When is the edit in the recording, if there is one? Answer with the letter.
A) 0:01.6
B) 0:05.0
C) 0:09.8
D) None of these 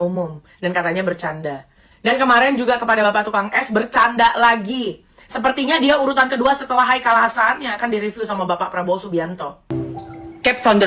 C